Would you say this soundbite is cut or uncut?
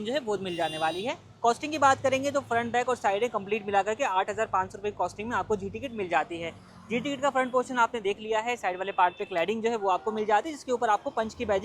uncut